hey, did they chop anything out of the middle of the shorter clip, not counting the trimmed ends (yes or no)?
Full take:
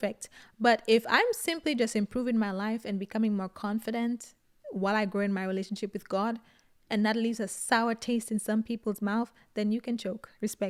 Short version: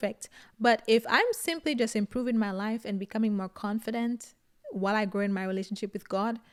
no